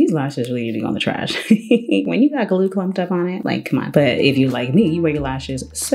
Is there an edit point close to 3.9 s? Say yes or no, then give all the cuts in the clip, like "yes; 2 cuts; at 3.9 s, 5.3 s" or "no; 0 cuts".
no; 0 cuts